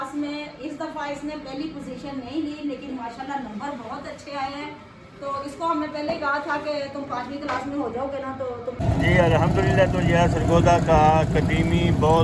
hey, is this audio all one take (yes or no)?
no